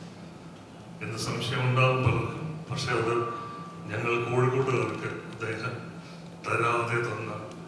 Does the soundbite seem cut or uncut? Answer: uncut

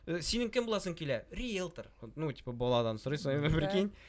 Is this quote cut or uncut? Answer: uncut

